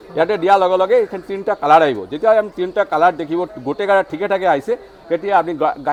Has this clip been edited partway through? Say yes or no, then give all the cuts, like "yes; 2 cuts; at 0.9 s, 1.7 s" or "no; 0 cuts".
no; 0 cuts